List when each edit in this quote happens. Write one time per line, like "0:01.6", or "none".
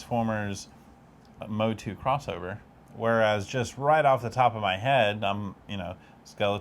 0:02.8